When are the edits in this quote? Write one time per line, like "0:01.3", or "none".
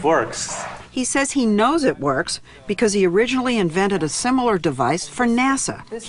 0:01.5